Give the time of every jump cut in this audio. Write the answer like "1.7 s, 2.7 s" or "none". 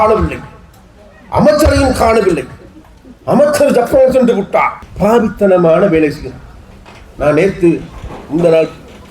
4.8 s